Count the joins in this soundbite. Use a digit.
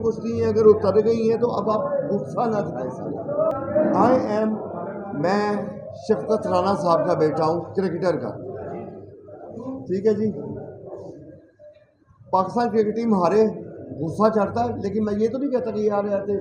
0